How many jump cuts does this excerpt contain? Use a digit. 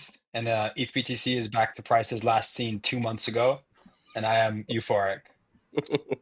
0